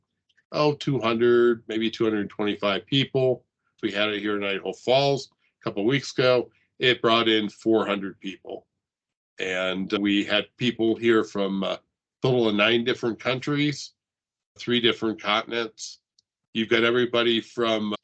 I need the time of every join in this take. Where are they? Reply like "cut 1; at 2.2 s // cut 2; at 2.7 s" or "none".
cut 1; at 3.7 s